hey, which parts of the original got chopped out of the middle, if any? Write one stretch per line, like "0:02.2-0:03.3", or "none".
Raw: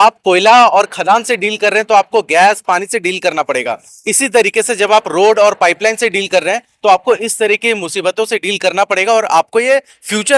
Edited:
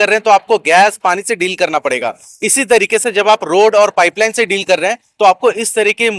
none